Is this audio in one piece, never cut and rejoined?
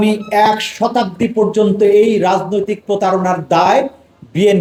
yes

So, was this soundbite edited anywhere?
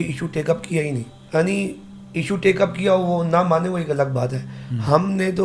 yes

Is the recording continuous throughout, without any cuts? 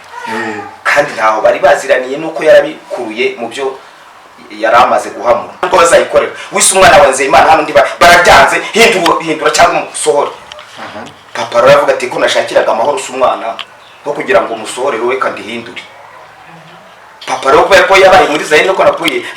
no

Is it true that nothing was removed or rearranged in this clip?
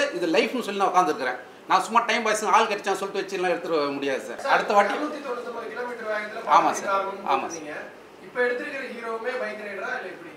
yes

